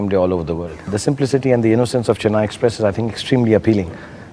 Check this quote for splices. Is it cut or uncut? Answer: cut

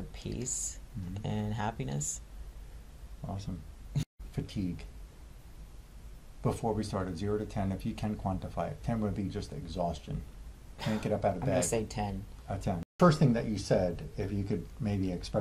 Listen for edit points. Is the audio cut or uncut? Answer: cut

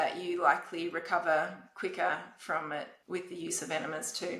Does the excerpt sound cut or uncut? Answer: cut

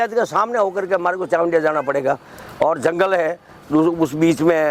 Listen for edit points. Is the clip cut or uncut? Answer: uncut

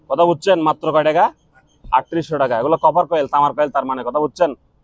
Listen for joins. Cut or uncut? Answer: uncut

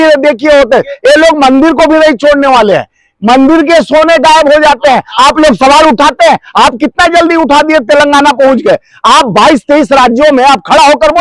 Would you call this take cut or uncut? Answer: uncut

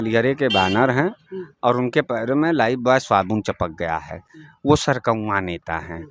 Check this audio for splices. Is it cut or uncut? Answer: uncut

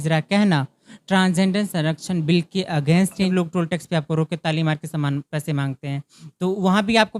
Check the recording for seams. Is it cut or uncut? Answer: cut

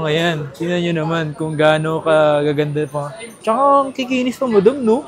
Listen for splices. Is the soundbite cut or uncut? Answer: uncut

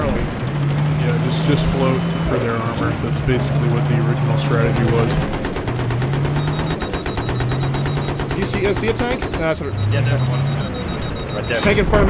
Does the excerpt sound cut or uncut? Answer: uncut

